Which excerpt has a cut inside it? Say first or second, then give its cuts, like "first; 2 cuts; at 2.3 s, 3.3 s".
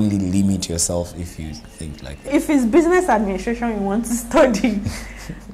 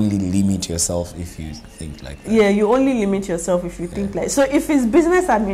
first; 1 cut; at 2.3 s